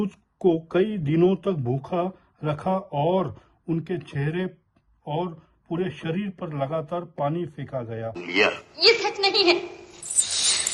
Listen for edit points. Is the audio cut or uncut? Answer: uncut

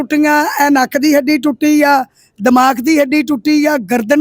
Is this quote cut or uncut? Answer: uncut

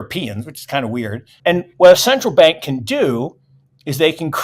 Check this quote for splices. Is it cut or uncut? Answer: cut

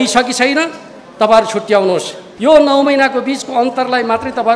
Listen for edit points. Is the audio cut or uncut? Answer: cut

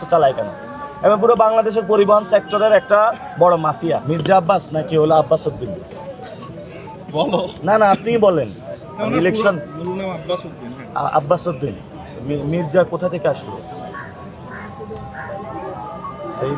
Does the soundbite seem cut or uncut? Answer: cut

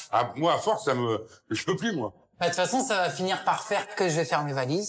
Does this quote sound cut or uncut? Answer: cut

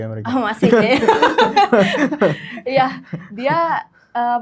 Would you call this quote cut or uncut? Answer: uncut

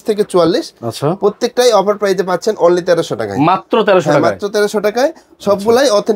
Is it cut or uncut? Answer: uncut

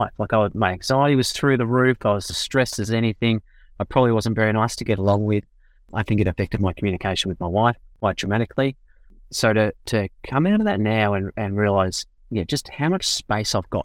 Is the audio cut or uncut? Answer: uncut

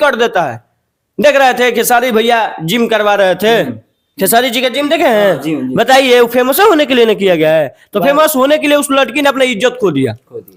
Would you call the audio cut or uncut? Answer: uncut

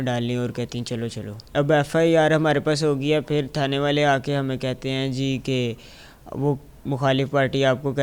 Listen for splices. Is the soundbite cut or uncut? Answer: cut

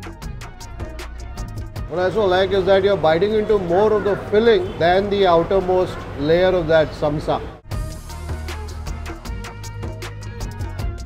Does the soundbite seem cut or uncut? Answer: uncut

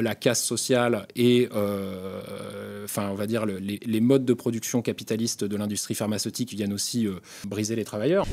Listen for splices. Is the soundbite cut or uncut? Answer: cut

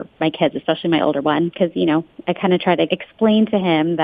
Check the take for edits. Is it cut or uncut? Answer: cut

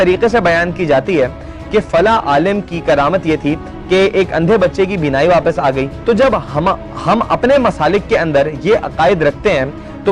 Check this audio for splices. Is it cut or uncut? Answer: cut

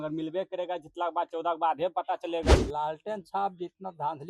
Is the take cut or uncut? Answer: cut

